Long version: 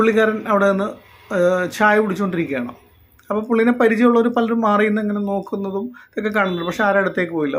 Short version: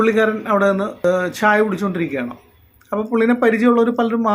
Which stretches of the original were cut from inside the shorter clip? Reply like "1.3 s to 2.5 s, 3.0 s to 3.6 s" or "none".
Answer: 1.0 s to 1.4 s